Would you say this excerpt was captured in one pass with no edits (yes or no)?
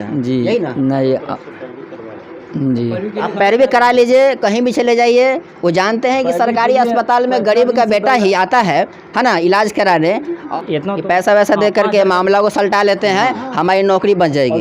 no